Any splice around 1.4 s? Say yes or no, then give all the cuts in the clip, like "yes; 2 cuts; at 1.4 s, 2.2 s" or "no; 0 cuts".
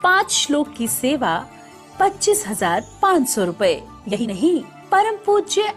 no; 1 cut; at 4.2 s